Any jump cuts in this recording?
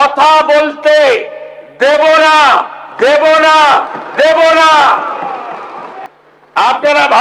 yes; 1 cut; at 5.9 s

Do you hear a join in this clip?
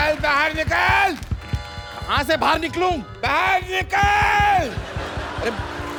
no; 0 cuts

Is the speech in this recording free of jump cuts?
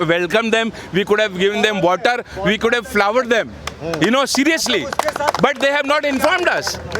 yes; 0 cuts

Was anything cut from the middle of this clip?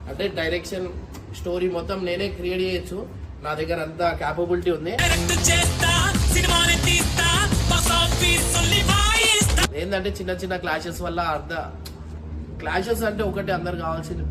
yes; 1 cut; at 9.7 s

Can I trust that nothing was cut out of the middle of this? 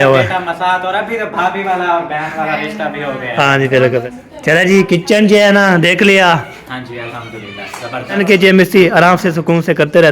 no; 2 cuts; at 4.0 s, 8.2 s

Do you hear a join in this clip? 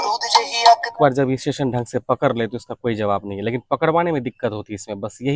yes; 1 cut; at 1.0 s

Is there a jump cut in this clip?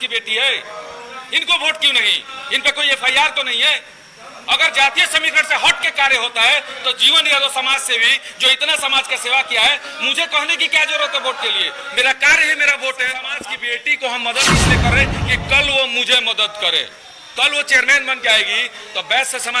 yes; 1 cut; at 13.3 s

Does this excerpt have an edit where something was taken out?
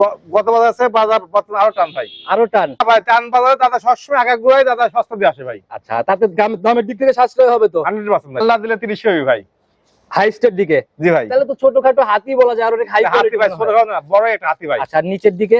yes; 2 cuts; at 2.8 s, 8.3 s

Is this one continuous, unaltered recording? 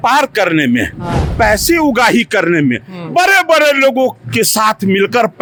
yes; 0 cuts

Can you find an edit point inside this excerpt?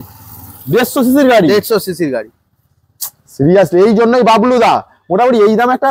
no; 0 cuts

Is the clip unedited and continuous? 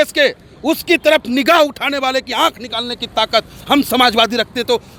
yes; 0 cuts

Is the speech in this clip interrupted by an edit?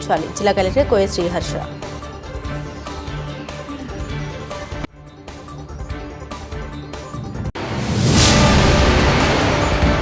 no; 0 cuts

